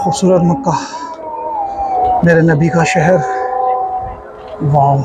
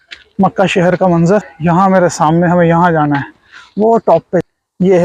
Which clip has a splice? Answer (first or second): second